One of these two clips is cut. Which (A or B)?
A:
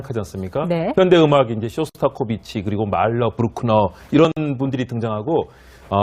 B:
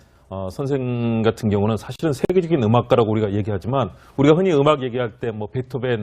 B